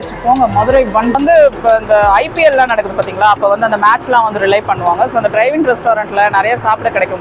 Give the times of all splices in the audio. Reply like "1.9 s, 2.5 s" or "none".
1.2 s